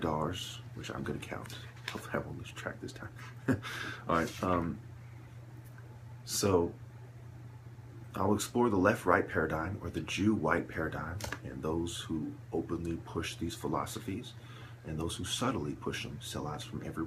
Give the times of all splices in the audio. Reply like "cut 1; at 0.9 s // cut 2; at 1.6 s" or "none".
none